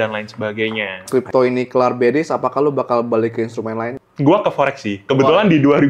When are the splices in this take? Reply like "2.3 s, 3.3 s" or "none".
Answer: 1.1 s, 4.0 s